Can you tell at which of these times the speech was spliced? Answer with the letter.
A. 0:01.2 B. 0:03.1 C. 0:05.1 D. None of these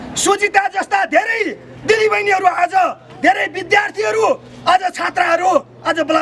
D